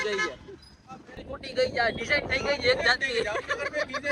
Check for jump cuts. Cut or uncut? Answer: cut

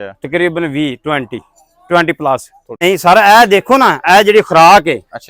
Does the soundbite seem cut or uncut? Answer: cut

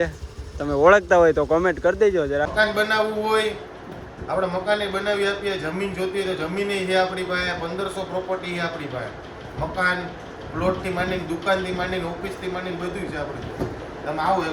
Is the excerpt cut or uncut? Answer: cut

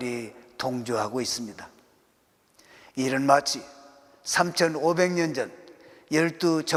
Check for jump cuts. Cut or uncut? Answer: uncut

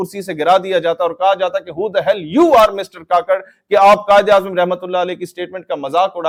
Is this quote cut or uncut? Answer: uncut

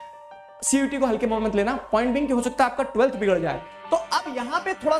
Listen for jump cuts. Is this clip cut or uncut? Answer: cut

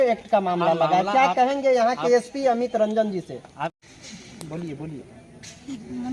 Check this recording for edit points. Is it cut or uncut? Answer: cut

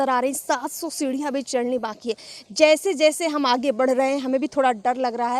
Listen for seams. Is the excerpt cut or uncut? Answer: uncut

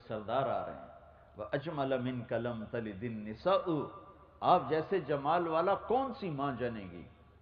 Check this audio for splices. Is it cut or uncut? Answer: cut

